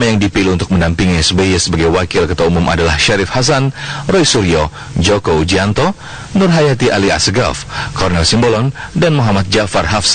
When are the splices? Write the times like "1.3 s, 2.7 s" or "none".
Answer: 8.1 s